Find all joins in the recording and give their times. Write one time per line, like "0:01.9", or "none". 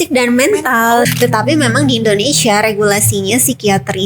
0:01.1